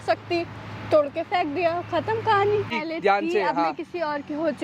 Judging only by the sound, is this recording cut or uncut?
cut